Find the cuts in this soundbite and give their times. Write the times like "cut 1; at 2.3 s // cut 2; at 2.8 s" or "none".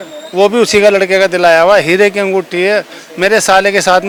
none